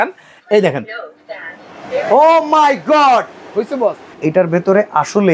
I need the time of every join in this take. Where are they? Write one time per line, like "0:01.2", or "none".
0:04.1